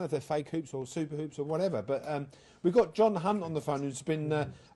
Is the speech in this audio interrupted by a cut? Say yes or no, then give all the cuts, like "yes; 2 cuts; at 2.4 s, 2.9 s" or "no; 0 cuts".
no; 0 cuts